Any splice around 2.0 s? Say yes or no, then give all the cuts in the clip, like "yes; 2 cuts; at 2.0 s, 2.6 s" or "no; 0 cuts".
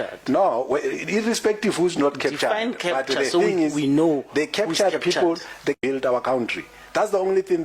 no; 1 cut; at 5.8 s